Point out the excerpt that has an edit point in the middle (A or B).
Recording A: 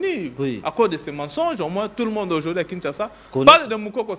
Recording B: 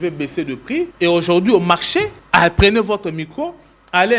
B